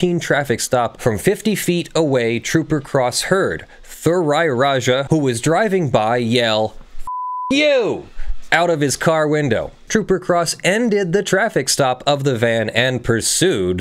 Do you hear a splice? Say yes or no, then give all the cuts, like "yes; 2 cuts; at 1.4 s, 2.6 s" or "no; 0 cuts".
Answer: yes; 3 cuts; at 0.9 s, 5.0 s, 9.8 s